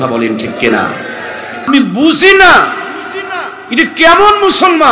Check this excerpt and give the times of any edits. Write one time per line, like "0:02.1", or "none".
0:01.7